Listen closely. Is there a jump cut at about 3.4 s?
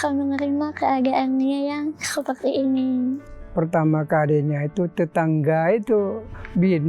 yes; 1 cut; at 3.4 s

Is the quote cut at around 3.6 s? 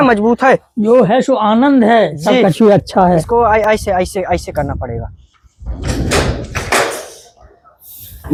no; 0 cuts

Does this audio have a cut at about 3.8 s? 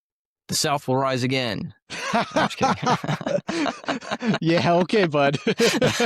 no; 0 cuts

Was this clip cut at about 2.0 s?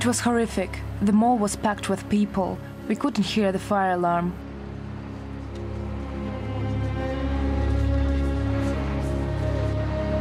no; 0 cuts

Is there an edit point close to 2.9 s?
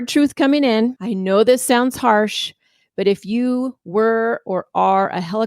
no; 1 cut; at 1.1 s

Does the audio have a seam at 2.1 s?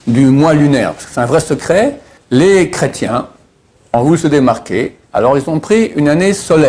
yes; 1 cut; at 2.1 s

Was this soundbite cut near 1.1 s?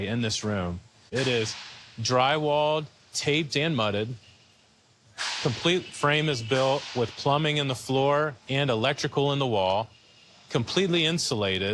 yes; 1 cut; at 1.1 s

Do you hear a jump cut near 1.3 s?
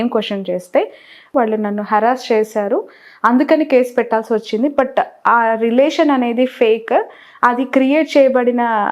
yes; 1 cut; at 1.3 s

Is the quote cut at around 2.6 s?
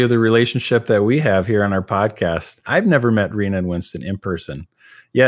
yes; 1 cut; at 2.6 s

